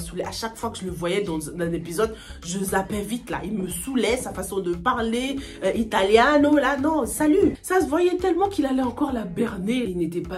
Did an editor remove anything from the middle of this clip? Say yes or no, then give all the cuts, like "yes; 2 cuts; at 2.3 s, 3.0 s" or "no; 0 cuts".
no; 0 cuts